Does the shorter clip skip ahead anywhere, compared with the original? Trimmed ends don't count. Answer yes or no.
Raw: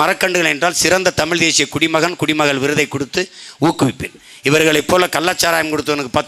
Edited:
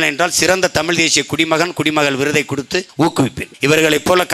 yes